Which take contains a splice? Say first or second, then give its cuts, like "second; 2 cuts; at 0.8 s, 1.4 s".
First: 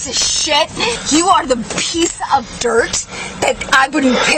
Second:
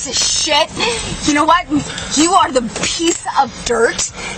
first; 1 cut; at 1.0 s